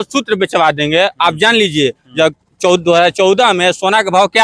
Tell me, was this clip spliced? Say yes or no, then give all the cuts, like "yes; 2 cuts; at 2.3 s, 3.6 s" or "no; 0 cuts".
no; 0 cuts